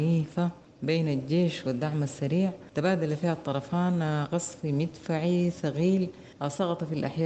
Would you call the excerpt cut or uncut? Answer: uncut